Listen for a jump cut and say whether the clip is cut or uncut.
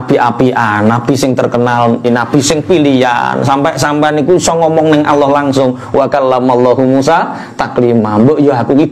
cut